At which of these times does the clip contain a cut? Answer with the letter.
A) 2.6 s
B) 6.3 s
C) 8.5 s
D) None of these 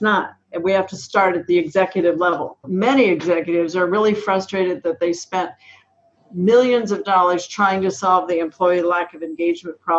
A